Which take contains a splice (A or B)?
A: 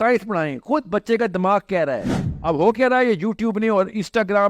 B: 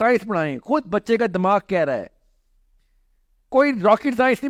A